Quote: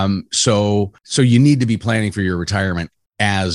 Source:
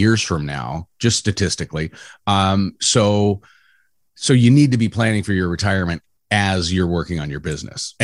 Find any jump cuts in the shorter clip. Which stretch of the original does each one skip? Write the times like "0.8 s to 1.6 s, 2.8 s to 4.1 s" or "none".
3.5 s to 4.1 s